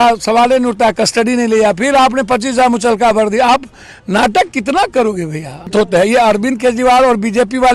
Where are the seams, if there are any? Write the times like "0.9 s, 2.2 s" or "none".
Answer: 5.7 s